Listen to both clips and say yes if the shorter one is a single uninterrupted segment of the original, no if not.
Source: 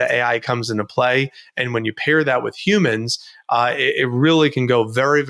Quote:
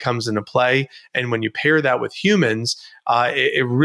yes